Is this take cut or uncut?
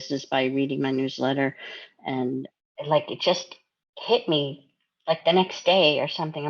cut